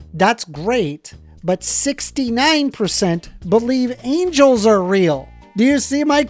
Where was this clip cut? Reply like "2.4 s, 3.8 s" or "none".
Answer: 5.3 s